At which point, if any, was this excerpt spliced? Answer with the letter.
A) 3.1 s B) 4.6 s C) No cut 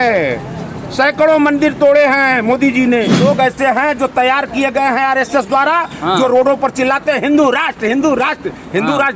A